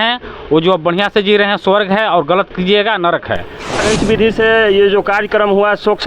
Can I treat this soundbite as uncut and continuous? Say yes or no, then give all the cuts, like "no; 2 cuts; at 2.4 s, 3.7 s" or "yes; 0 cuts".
no; 1 cut; at 3.8 s